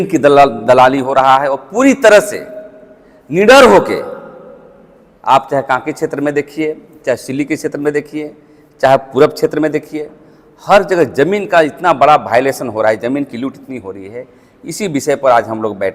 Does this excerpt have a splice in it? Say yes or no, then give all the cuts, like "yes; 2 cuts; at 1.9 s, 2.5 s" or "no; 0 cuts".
no; 0 cuts